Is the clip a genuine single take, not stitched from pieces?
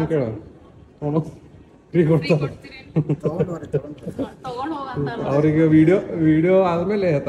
yes; 0 cuts

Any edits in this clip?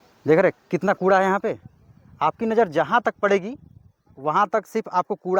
no; 0 cuts

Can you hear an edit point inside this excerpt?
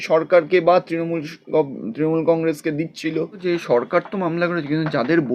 yes; 1 cut; at 3.4 s

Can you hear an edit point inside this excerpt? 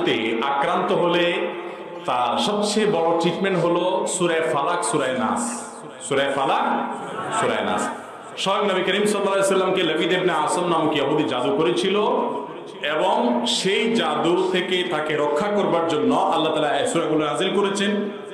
yes; 1 cut; at 1.1 s

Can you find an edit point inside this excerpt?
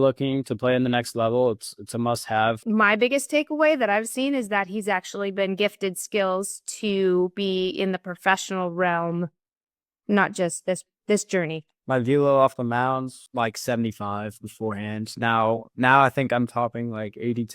yes; 2 cuts; at 2.6 s, 11.8 s

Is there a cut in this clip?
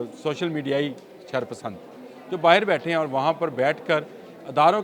no; 0 cuts

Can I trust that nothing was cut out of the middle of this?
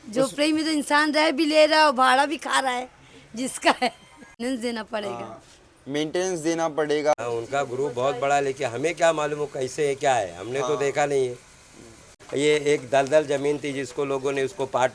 no; 2 cuts; at 7.1 s, 12.1 s

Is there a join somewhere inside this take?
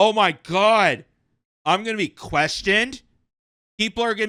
no; 0 cuts

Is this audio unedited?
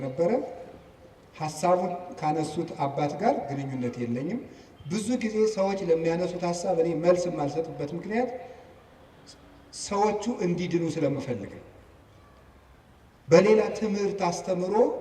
yes; 0 cuts

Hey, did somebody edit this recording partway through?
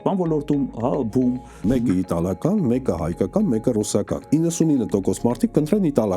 yes; 2 cuts; at 1.6 s, 4.2 s

